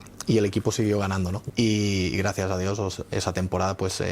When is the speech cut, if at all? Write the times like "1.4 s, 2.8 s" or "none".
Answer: 1.4 s